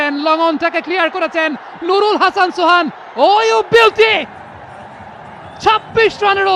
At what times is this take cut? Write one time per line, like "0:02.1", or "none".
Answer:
none